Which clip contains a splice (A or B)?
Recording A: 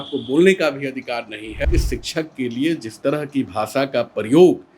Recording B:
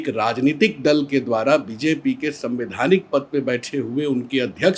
A